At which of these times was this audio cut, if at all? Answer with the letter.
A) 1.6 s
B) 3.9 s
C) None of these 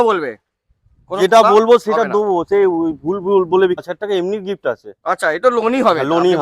B